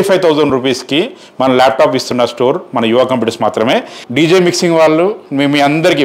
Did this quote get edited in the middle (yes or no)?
yes